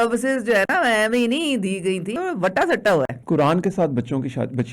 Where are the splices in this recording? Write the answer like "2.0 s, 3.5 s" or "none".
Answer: 2.2 s, 3.2 s